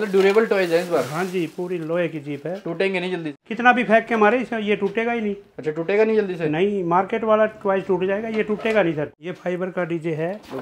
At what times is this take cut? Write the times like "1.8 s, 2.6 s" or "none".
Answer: 3.3 s, 9.1 s